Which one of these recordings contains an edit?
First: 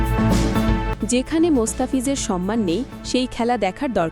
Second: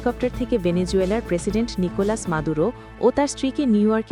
first; 1 cut; at 0.9 s

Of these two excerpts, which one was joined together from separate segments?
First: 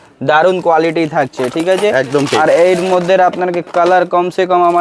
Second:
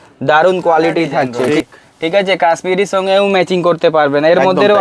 second; 1 cut; at 1.4 s

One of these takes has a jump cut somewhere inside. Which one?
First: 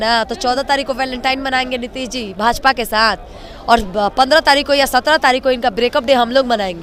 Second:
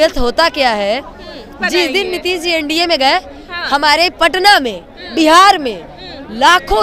second; 1 cut; at 1.5 s

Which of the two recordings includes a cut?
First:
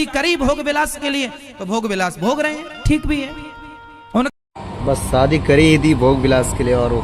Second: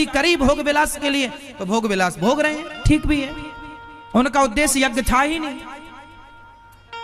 second; 1 cut; at 4.3 s

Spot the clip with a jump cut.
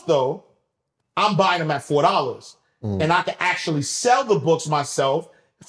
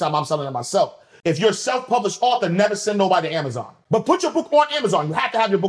second; 2 cuts; at 1.1 s, 3.7 s

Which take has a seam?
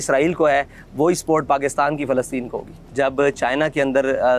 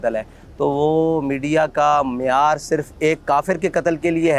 first; 1 cut; at 2.8 s

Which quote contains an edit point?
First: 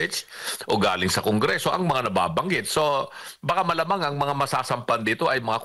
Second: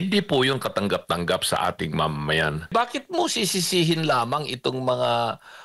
second; 1 cut; at 2.7 s

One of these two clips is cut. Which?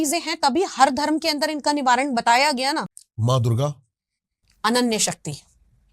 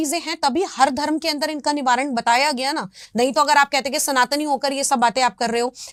first; 1 cut; at 3.0 s

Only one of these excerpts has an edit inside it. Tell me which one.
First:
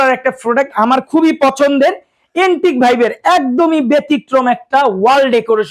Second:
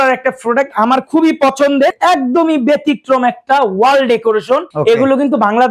second; 2 cuts; at 2.0 s, 4.7 s

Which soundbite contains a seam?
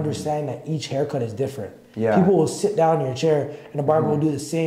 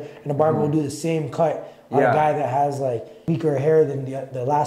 second; 1 cut; at 3.1 s

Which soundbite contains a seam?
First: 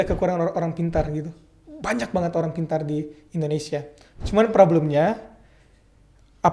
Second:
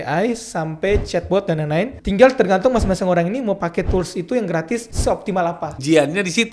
second; 2 cuts; at 2.0 s, 5.2 s

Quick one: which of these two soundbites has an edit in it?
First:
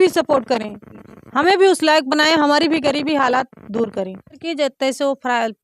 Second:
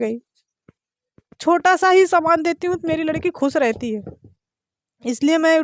first; 1 cut; at 4.4 s

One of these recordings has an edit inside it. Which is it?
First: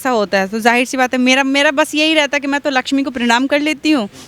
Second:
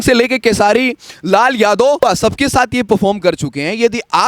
second; 1 cut; at 2.0 s

